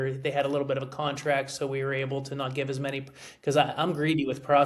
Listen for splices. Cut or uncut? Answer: uncut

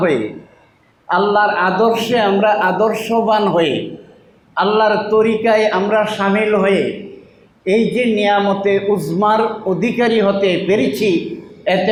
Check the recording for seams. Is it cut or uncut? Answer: uncut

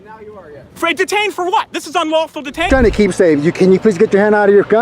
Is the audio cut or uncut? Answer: cut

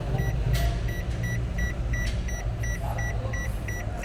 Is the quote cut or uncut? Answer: uncut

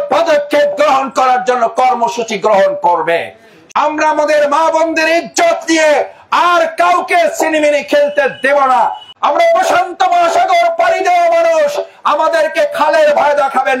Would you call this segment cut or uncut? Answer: cut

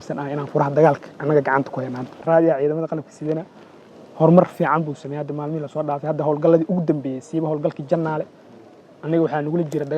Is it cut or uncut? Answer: cut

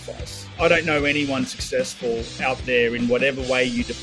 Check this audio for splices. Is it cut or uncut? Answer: uncut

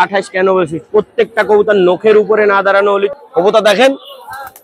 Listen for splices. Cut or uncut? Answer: cut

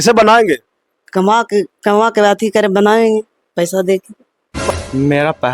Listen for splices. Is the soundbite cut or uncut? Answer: cut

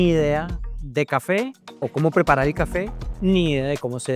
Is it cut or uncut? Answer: uncut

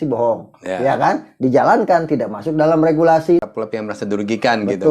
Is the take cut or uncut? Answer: cut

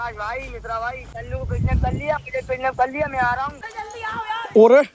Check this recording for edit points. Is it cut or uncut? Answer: cut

